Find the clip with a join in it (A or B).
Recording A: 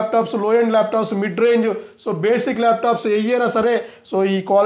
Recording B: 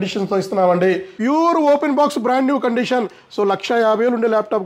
B